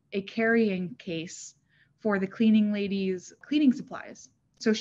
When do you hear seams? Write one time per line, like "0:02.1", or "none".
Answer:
0:03.3